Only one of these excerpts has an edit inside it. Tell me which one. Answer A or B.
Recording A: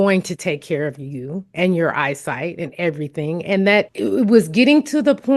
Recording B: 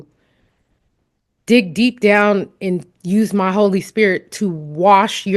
A